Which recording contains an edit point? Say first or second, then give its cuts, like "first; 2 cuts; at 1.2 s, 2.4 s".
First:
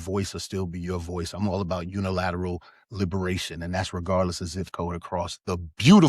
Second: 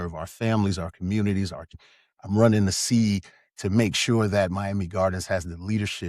second; 1 cut; at 1.8 s